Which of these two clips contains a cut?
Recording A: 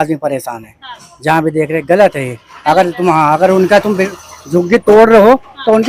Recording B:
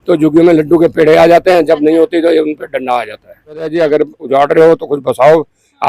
B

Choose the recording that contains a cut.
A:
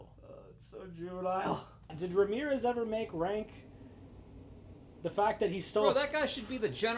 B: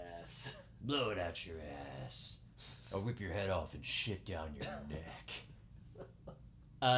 A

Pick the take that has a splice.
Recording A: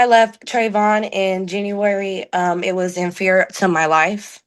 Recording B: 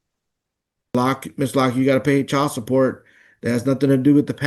B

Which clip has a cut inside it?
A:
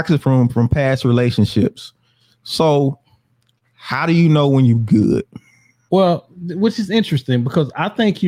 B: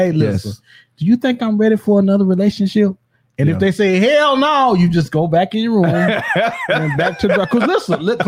A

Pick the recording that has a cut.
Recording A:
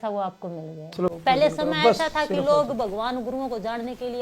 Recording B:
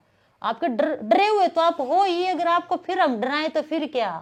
A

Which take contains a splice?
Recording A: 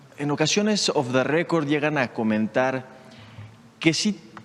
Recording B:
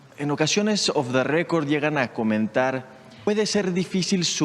B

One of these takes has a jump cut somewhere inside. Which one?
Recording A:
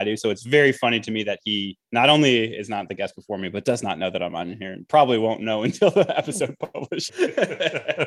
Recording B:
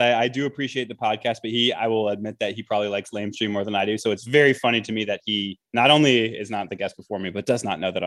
A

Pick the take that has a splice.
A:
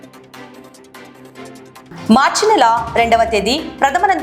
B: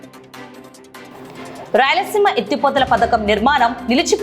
B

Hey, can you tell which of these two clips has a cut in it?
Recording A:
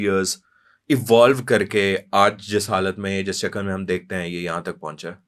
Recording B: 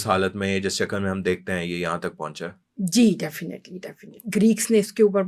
B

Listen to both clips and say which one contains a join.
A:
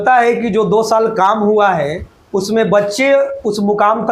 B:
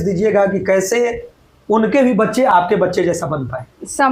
B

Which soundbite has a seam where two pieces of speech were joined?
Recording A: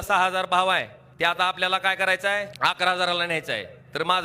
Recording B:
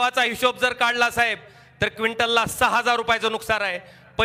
A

